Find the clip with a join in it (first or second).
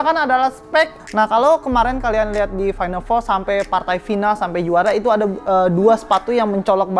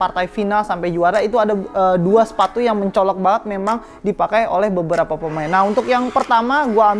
first